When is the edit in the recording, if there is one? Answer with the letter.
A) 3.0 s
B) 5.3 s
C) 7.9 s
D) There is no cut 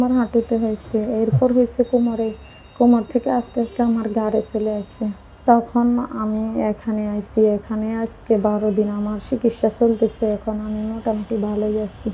B